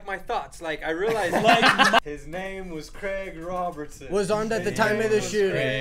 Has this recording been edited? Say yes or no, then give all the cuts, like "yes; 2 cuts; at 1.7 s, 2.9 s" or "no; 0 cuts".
yes; 1 cut; at 2.0 s